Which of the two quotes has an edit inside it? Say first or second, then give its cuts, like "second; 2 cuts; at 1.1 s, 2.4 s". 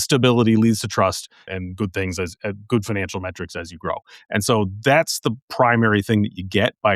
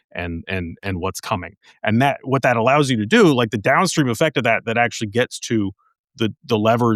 first; 1 cut; at 1.5 s